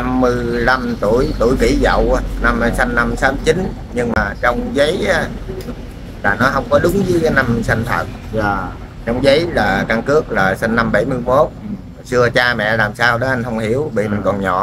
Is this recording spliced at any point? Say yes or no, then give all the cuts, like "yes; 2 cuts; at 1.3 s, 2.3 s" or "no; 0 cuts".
no; 0 cuts